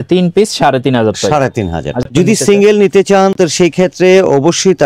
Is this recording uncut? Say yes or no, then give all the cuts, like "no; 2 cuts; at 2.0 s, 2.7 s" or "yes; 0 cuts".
no; 1 cut; at 2.1 s